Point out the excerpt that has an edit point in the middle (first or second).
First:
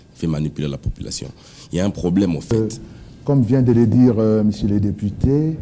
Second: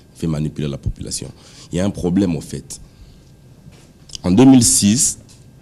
first